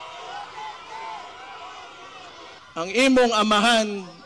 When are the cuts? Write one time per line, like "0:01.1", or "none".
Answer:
0:02.6